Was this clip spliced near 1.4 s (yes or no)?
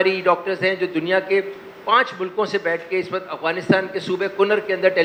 no